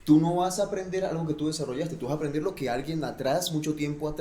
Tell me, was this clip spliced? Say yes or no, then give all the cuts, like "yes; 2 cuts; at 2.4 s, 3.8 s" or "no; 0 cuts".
no; 0 cuts